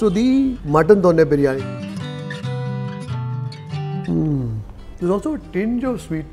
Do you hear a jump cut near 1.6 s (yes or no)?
yes